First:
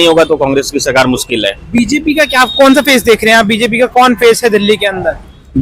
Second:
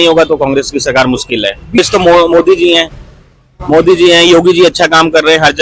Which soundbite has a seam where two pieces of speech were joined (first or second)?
second